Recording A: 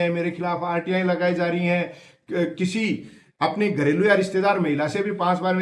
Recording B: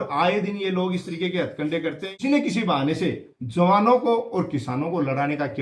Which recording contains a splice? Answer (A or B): B